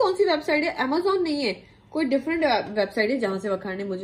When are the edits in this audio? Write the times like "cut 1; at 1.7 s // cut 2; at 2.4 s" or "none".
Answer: none